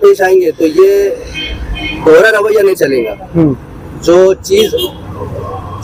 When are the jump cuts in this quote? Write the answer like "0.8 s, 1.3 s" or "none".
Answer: none